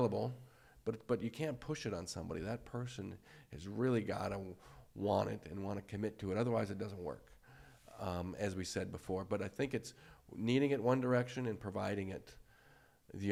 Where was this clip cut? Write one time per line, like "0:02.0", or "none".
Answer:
none